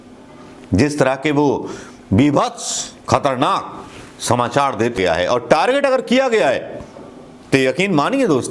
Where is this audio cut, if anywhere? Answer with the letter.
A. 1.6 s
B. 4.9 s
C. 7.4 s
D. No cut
B